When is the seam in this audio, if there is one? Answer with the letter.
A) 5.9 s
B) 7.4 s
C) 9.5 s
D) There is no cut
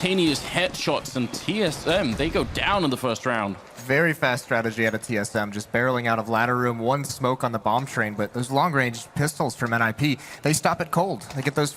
B